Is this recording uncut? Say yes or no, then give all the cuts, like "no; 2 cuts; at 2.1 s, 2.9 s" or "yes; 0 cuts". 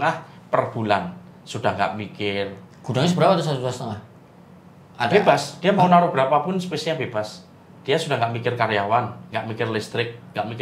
yes; 0 cuts